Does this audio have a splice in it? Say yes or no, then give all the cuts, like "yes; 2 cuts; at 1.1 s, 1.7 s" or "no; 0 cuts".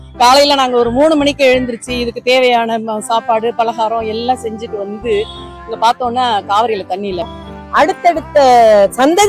yes; 1 cut; at 7.3 s